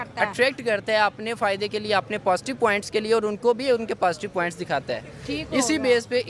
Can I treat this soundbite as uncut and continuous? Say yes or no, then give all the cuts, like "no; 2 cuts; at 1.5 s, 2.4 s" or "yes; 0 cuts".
yes; 0 cuts